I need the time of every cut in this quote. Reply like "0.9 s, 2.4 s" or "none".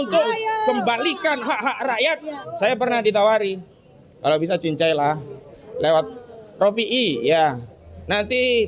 2.4 s